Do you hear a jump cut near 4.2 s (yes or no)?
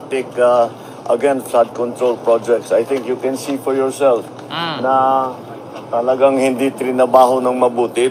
yes